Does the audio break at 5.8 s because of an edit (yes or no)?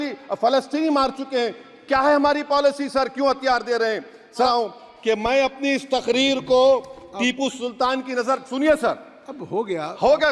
no